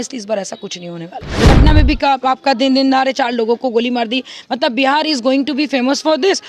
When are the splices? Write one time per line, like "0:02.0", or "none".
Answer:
0:01.5